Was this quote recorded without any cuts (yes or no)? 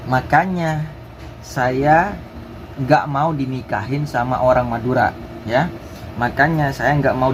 yes